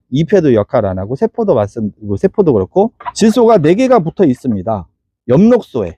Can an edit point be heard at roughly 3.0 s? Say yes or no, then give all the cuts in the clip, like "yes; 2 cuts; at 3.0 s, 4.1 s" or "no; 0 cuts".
yes; 1 cut; at 3.0 s